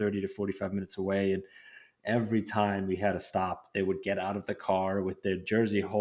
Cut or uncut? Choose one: uncut